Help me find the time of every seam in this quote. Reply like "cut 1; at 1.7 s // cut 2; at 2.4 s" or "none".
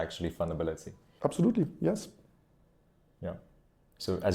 none